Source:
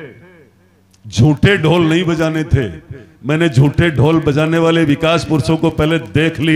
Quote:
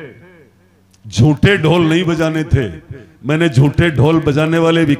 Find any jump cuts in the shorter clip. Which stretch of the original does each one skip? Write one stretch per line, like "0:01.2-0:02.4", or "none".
none